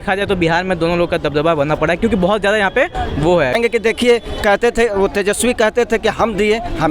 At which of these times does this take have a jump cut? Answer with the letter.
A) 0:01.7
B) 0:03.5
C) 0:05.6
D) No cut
B